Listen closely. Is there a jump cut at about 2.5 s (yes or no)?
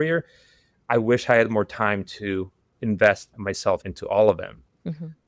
no